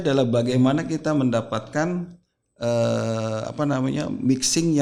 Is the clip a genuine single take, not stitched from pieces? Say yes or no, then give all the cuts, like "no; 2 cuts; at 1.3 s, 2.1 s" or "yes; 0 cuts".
yes; 0 cuts